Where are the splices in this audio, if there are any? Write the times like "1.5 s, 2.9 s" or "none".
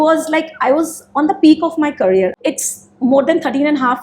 2.4 s